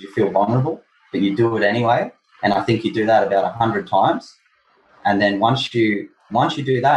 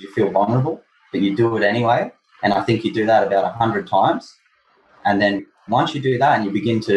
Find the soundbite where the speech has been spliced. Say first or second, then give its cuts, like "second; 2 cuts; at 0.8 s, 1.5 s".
second; 1 cut; at 5.4 s